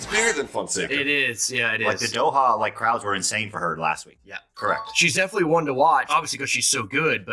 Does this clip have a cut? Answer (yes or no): yes